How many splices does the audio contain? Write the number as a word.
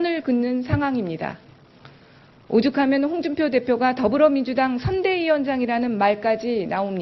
one